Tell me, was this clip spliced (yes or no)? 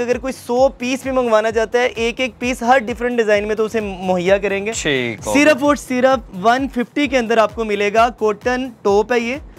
no